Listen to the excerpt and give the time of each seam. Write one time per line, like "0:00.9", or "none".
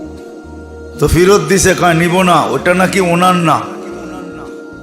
0:01.0